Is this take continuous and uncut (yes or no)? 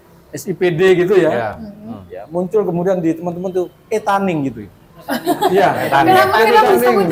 yes